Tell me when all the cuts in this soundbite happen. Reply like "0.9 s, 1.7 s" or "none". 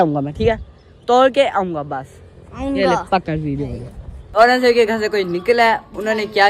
4.3 s